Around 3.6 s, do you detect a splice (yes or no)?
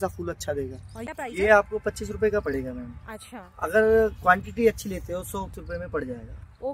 no